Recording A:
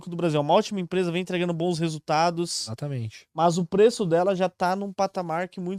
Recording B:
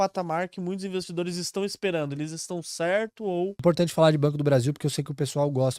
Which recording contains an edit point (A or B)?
B